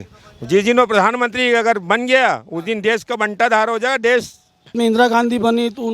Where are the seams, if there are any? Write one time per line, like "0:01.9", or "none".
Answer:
0:04.7